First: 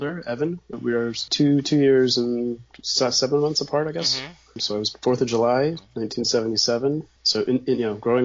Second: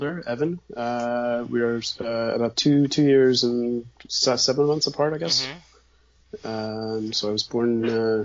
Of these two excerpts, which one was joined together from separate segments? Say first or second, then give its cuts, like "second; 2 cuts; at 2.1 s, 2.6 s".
first; 3 cuts; at 1.2 s, 4.9 s, 7.2 s